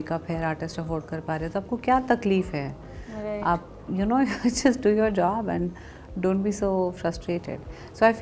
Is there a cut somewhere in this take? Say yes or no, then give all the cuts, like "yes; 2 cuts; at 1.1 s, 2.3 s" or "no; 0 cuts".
no; 0 cuts